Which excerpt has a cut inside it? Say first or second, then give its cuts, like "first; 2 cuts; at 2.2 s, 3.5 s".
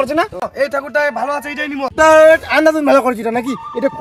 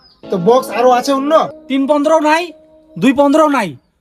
second; 1 cut; at 1.6 s